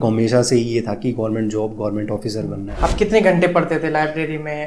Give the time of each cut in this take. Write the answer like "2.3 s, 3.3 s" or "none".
2.8 s